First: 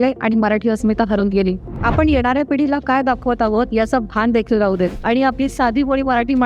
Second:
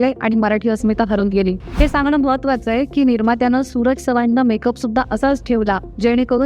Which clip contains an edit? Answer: first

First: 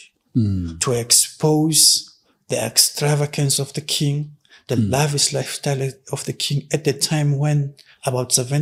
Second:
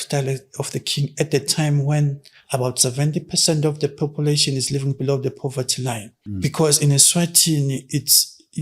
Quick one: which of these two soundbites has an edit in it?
second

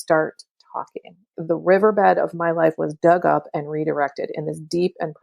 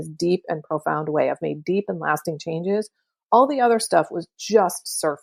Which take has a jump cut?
first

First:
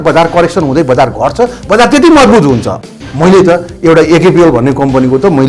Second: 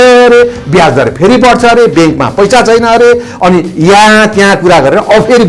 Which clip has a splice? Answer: first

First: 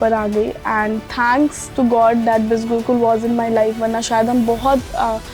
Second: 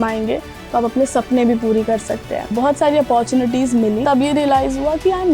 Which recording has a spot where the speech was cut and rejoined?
second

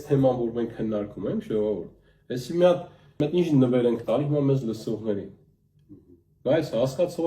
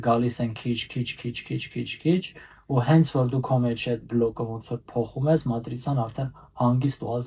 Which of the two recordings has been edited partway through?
first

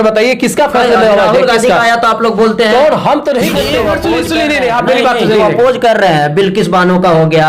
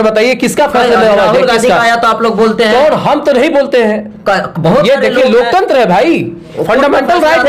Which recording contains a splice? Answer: first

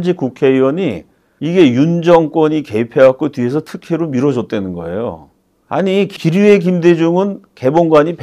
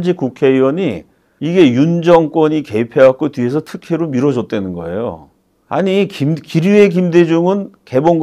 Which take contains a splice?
first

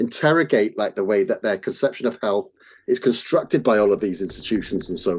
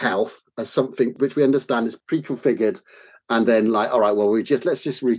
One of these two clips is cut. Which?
second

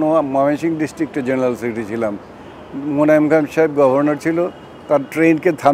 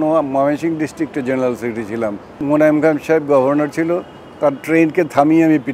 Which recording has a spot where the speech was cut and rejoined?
second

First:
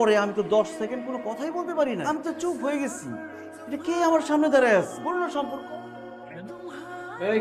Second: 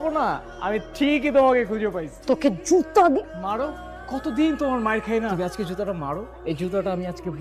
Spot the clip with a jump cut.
second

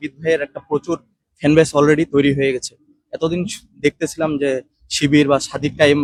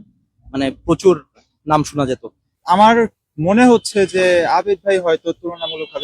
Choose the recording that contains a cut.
second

